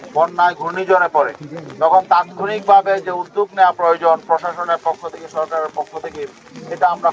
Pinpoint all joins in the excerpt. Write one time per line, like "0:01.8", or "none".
none